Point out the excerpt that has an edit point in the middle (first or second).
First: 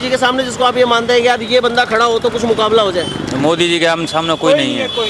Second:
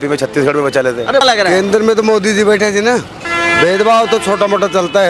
second